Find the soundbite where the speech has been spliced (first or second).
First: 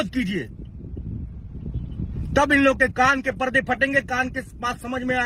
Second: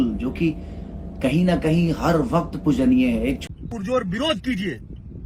second